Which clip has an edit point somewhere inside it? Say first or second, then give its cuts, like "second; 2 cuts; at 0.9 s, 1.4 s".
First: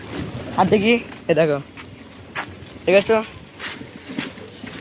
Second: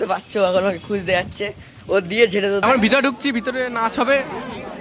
second; 1 cut; at 2.6 s